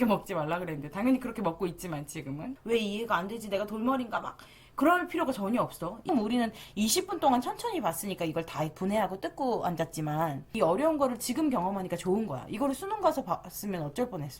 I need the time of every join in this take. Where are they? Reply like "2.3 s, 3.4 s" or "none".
2.5 s, 6.1 s, 10.5 s